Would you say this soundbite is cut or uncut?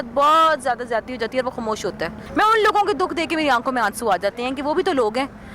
cut